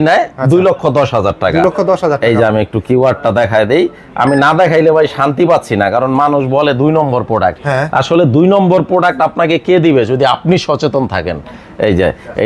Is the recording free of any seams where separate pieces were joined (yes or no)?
yes